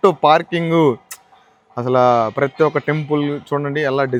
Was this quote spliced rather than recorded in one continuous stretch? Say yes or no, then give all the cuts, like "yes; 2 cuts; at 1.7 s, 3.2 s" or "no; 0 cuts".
no; 0 cuts